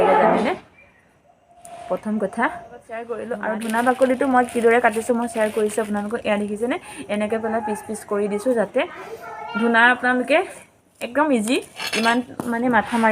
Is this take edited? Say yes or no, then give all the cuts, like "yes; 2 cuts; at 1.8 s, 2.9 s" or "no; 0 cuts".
yes; 1 cut; at 3.1 s